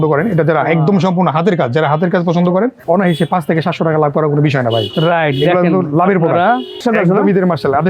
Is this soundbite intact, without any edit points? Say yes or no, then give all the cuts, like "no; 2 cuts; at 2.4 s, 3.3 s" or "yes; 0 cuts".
no; 2 cuts; at 2.8 s, 6.8 s